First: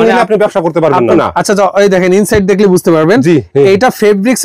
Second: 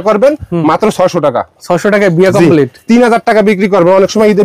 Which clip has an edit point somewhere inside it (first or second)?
first